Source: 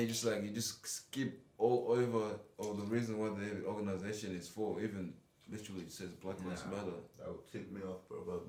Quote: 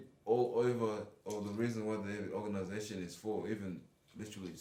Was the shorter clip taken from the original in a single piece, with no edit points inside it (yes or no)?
yes